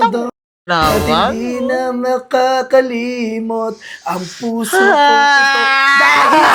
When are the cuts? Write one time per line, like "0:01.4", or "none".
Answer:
none